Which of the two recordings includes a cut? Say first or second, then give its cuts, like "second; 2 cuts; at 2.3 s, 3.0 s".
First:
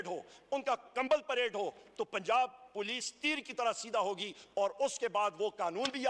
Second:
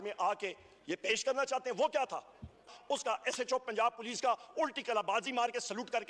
second; 1 cut; at 2.8 s